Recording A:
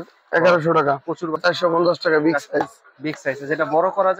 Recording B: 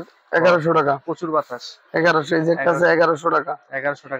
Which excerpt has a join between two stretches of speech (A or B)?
A